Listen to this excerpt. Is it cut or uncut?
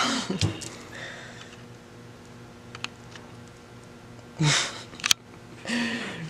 uncut